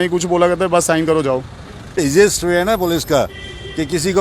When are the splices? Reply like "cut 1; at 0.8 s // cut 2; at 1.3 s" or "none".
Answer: cut 1; at 2.0 s